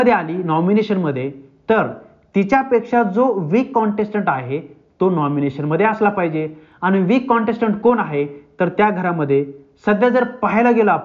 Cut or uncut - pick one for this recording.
uncut